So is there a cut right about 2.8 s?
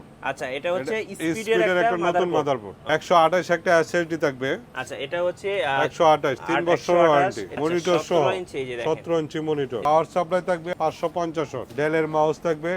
yes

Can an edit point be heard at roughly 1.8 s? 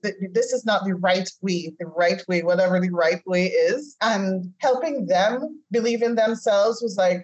no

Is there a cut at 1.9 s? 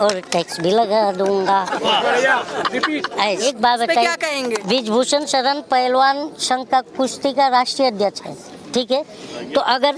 no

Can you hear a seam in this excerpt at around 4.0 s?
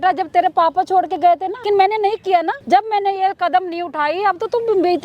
no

